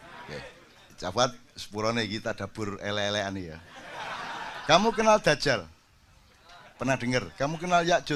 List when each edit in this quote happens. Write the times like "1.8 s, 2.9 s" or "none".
none